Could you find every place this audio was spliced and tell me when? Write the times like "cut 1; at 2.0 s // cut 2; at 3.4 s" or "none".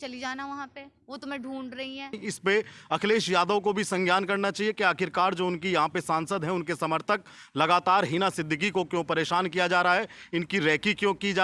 cut 1; at 2.3 s